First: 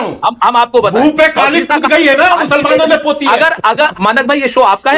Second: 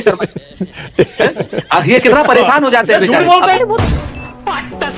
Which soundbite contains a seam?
first; 1 cut; at 3.9 s

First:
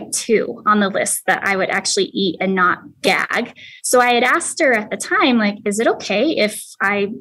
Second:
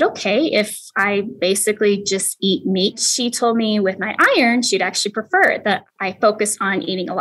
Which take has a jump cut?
second; 2 cuts; at 3.0 s, 5.9 s

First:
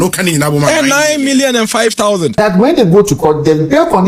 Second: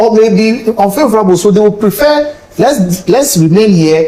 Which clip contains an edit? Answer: first; 1 cut; at 2.3 s

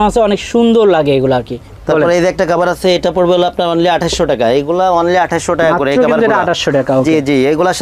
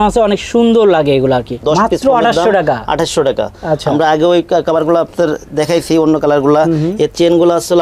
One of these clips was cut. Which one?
second; 1 cut; at 1.6 s

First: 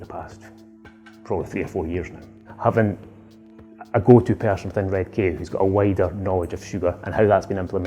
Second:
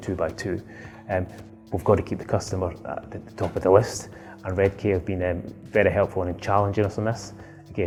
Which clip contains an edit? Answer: first; 1 cut; at 2.4 s

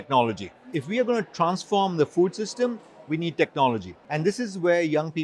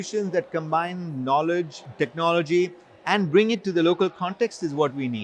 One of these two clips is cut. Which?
first; 1 cut; at 4.0 s

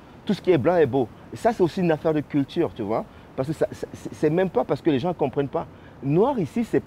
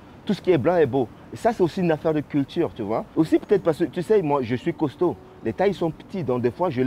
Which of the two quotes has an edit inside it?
second; 1 cut; at 3.1 s

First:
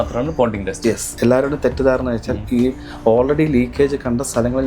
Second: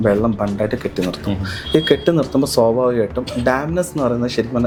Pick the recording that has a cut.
first; 1 cut; at 1.1 s

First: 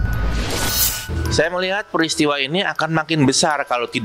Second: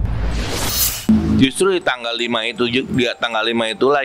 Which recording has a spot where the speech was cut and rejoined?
second; 1 cut; at 1.0 s

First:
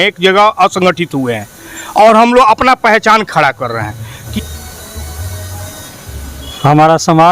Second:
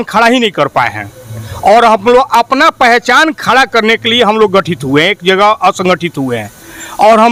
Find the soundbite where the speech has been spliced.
first; 1 cut; at 4.1 s

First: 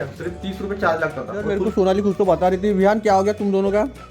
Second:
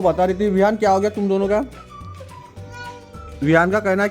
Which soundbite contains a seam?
first; 1 cut; at 1.3 s

